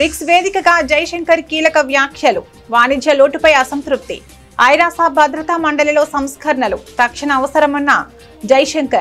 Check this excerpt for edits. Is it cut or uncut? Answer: uncut